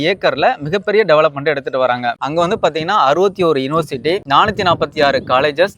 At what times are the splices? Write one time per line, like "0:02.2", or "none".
0:02.2